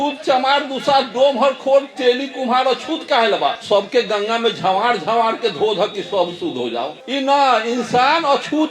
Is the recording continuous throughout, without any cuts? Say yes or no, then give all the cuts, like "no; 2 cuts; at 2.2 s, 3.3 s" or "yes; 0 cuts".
no; 2 cuts; at 3.6 s, 7.0 s